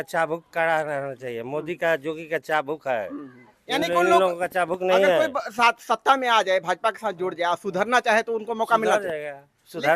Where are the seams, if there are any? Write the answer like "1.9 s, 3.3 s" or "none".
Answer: none